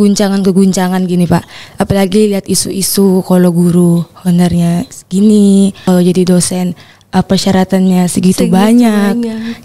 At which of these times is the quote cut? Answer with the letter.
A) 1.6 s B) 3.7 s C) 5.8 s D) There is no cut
C